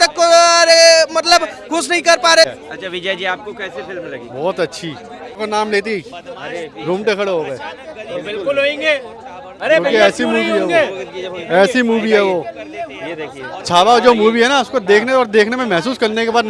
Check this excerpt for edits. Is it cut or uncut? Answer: cut